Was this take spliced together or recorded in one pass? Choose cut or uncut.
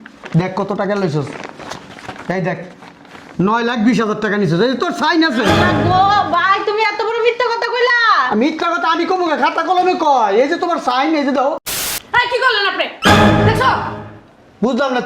cut